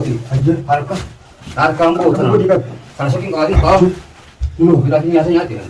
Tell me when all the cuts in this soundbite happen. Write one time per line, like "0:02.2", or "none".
none